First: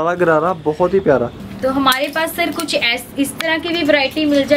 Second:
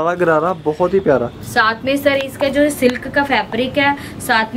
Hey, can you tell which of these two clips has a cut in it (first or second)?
first